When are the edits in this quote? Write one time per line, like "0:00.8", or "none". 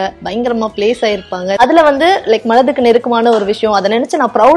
0:01.6